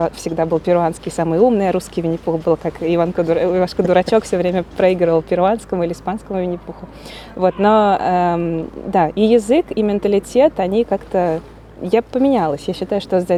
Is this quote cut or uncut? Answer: uncut